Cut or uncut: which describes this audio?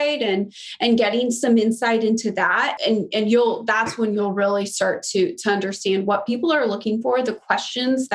cut